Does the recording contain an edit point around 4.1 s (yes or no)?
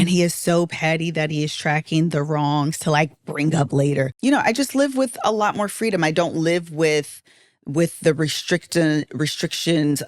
yes